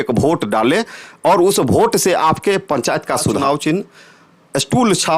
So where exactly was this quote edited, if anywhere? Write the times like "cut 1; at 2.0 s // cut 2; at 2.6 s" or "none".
cut 1; at 3.4 s